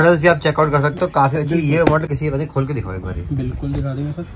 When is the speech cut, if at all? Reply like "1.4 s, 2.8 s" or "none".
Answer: none